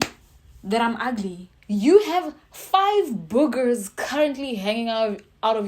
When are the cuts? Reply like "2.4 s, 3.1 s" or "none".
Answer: 1.5 s